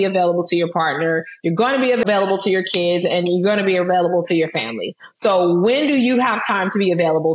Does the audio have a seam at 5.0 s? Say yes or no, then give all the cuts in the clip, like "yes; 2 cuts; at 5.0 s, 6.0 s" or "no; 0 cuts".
no; 1 cut; at 2.0 s